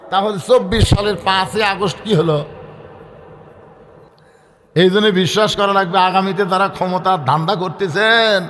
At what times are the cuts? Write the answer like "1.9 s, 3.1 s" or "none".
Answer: 4.1 s

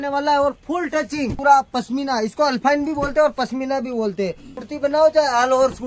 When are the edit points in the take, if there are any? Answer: 1.4 s, 4.6 s

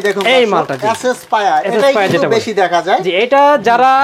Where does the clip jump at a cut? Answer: none

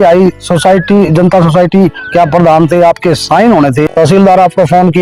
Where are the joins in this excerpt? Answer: 3.9 s

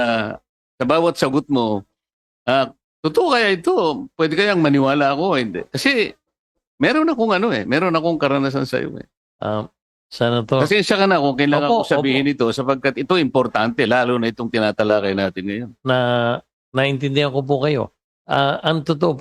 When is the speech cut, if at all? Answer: none

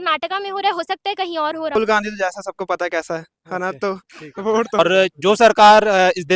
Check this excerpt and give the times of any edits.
1.8 s, 4.8 s

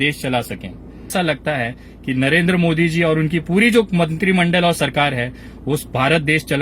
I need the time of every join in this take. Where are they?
1.1 s

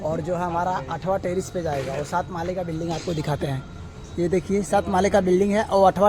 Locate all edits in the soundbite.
none

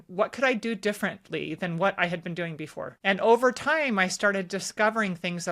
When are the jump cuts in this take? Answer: 2.9 s

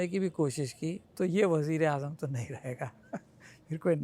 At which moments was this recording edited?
1.0 s

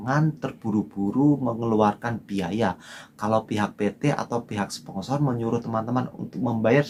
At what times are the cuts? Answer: none

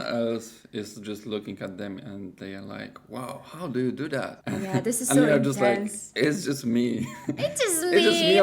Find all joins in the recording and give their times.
4.4 s

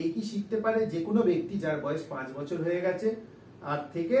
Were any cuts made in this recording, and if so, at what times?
none

